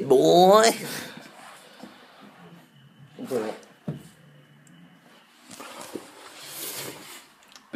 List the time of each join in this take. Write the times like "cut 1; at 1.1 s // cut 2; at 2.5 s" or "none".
cut 1; at 1.0 s